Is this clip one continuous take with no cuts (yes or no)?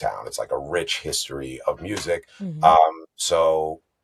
yes